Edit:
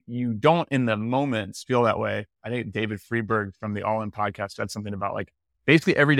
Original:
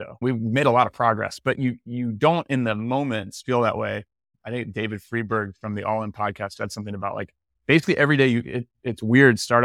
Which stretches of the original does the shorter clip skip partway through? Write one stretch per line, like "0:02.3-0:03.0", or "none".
0:04.1-0:04.3